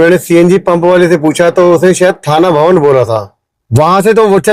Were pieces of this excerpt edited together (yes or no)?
yes